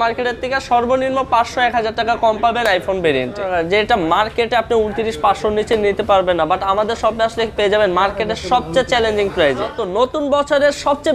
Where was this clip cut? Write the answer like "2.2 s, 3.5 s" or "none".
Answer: 3.4 s, 9.7 s

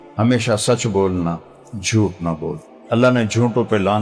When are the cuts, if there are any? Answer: 2.7 s

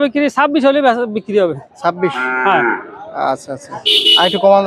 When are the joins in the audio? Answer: none

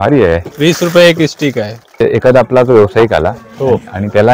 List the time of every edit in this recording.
2.0 s

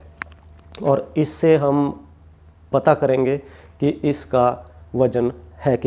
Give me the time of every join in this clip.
none

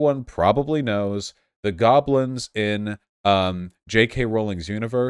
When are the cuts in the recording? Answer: none

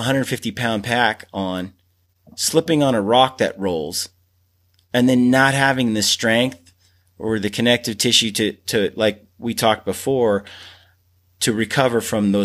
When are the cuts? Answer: none

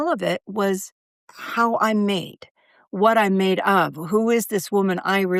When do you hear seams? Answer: none

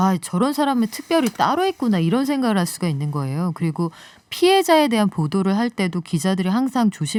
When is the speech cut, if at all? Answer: none

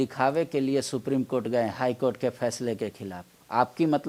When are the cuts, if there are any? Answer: none

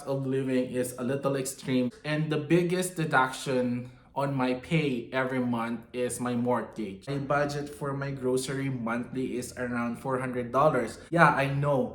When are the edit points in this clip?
7.1 s, 11.0 s

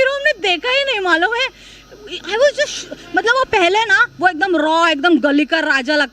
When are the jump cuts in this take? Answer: none

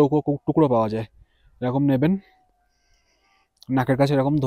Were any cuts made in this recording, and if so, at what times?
none

